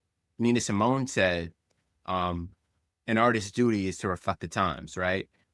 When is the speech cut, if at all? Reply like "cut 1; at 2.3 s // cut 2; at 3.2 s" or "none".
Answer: none